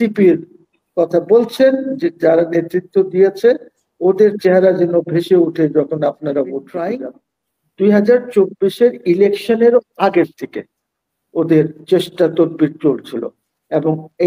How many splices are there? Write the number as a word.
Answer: one